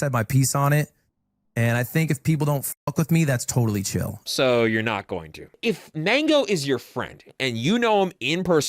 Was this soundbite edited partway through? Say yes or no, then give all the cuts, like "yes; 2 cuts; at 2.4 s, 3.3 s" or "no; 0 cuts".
yes; 1 cut; at 5.5 s